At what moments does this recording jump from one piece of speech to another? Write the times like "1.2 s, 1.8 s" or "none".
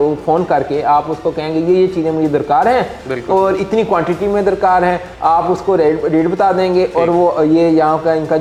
none